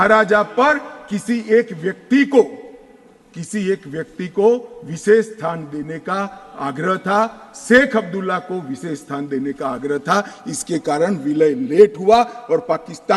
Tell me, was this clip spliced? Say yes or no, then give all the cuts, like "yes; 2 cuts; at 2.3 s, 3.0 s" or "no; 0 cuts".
no; 0 cuts